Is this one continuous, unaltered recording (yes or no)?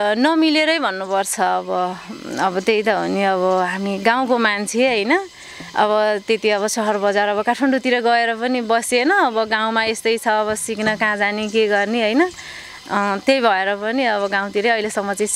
yes